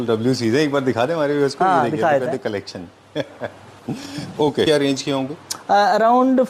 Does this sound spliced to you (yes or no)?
yes